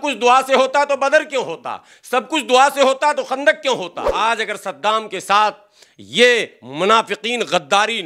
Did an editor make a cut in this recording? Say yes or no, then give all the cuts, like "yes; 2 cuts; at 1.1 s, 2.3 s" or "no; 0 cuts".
yes; 1 cut; at 4.0 s